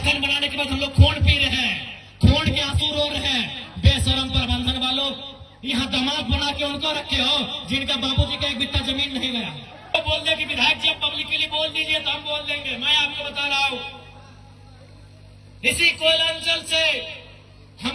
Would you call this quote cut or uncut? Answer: cut